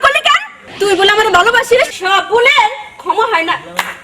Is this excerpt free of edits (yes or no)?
no